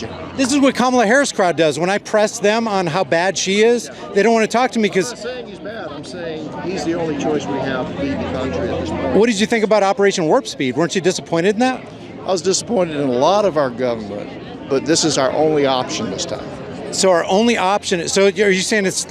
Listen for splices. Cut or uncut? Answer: uncut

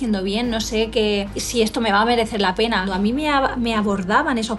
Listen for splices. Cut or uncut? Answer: cut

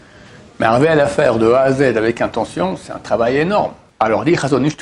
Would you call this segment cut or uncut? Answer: cut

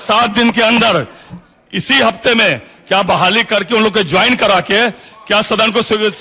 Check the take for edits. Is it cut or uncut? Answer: uncut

